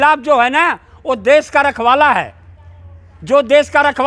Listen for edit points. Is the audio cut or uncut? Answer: uncut